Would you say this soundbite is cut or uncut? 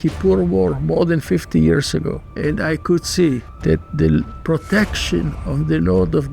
cut